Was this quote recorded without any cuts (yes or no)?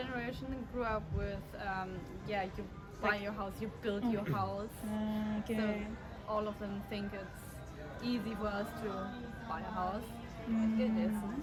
yes